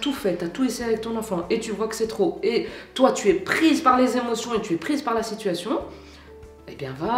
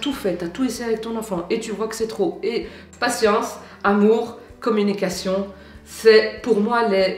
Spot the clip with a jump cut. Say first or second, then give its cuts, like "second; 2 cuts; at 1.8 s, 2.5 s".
second; 1 cut; at 2.8 s